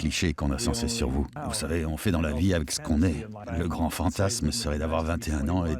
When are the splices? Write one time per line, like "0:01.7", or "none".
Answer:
0:01.4
0:03.4